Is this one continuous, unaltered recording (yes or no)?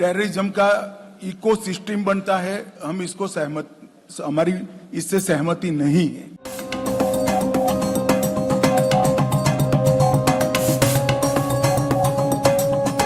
yes